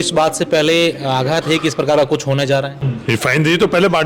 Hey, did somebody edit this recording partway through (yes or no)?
yes